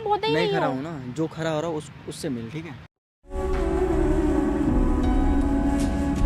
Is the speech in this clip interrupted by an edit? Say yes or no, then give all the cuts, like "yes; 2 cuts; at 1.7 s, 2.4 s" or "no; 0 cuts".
no; 0 cuts